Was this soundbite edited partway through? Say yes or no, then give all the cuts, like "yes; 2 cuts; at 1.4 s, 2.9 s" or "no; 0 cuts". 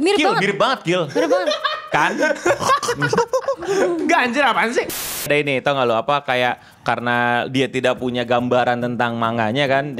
yes; 1 cut; at 4.9 s